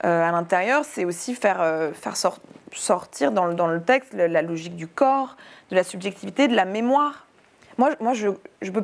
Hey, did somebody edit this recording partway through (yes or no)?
no